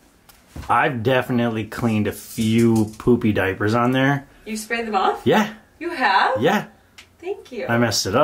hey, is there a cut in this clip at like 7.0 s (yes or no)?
no